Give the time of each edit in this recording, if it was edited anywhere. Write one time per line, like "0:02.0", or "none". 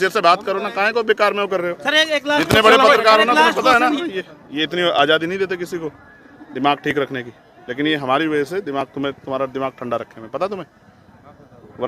0:04.0

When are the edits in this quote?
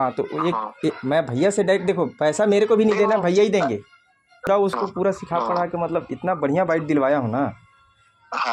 0:04.5

